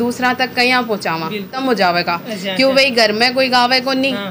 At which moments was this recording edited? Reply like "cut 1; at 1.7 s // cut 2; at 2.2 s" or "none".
cut 1; at 1.6 s